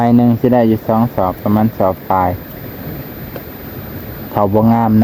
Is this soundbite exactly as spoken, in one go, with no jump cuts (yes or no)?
yes